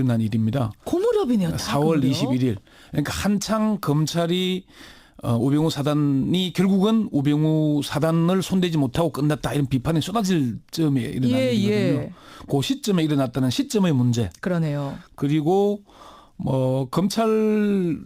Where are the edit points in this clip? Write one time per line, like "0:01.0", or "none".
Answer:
0:12.1